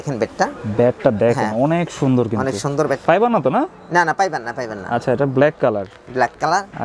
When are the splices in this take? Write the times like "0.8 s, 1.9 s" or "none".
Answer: 3.0 s